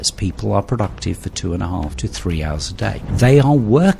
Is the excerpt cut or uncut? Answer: cut